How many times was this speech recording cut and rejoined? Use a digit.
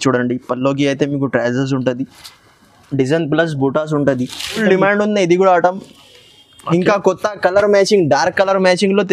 1